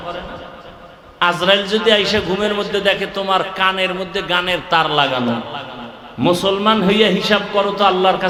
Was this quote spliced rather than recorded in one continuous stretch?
no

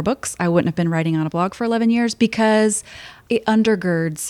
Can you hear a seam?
yes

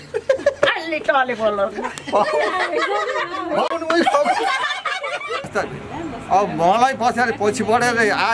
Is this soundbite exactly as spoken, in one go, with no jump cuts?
no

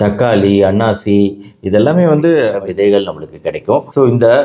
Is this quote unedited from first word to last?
no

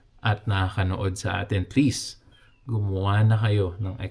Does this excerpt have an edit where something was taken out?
no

